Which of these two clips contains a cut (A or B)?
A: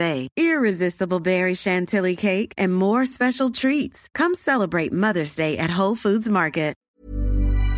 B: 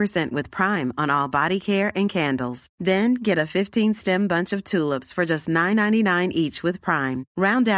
A